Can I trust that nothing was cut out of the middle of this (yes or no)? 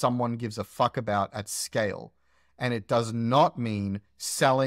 yes